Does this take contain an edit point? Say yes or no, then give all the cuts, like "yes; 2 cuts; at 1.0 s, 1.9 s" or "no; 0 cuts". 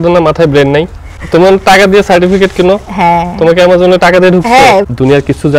yes; 2 cuts; at 1.1 s, 4.8 s